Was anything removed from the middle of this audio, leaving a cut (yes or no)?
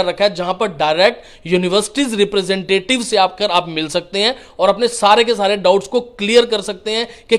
no